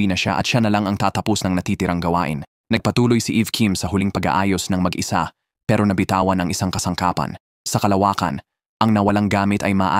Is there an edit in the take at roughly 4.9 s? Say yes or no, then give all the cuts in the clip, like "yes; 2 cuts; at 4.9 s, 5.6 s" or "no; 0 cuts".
no; 1 cut; at 2.8 s